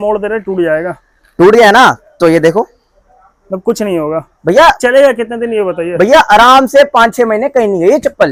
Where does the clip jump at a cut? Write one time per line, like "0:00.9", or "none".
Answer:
none

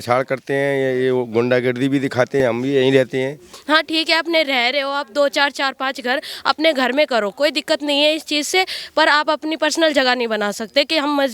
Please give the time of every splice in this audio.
0:02.4
0:03.4

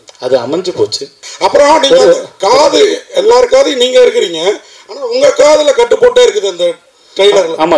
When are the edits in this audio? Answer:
0:01.2

